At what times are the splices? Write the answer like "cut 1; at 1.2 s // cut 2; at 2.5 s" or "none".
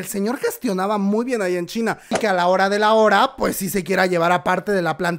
cut 1; at 2.1 s